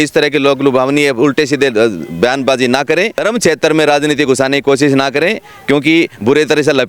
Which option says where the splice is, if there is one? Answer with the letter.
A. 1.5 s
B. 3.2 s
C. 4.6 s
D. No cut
B